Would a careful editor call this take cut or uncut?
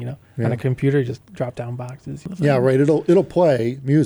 cut